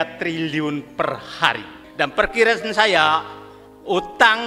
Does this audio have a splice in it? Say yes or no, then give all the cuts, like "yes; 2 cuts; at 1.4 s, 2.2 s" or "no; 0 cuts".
yes; 1 cut; at 1.8 s